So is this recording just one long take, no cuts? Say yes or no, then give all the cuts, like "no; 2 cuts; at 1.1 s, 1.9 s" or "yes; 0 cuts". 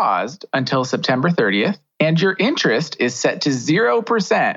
yes; 0 cuts